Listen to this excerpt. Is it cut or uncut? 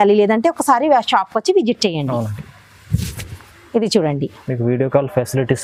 uncut